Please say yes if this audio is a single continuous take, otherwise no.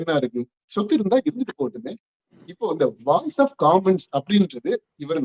no